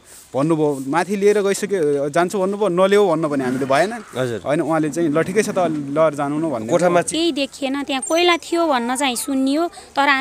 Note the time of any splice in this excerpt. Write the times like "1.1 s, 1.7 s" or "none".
7.1 s